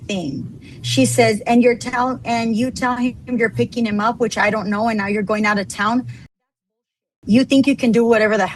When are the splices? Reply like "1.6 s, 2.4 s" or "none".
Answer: none